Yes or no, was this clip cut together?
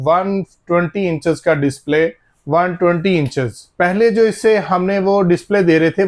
yes